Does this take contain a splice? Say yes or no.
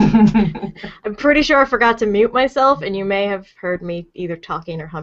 no